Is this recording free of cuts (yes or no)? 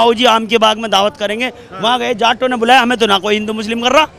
yes